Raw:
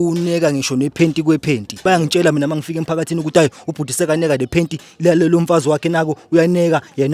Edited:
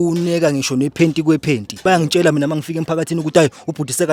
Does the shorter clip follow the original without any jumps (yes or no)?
yes